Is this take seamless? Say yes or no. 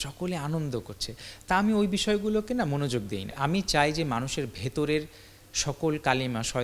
no